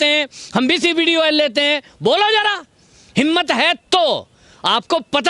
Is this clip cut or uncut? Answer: uncut